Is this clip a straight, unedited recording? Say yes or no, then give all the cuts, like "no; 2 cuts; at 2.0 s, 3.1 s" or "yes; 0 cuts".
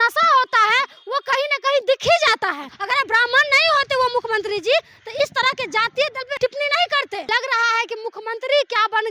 no; 3 cuts; at 2.7 s, 6.3 s, 7.3 s